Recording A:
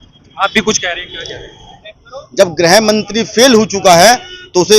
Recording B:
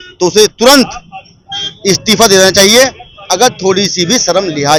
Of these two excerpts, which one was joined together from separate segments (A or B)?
A